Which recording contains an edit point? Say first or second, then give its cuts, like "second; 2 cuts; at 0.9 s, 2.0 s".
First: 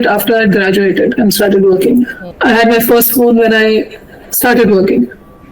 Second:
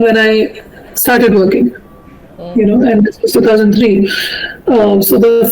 first; 1 cut; at 2.2 s